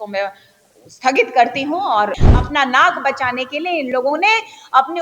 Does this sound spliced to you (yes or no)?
yes